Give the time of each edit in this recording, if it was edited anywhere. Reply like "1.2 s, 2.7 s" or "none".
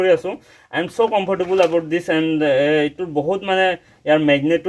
none